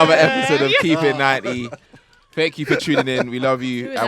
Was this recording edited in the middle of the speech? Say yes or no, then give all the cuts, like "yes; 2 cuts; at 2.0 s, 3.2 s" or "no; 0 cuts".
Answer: no; 0 cuts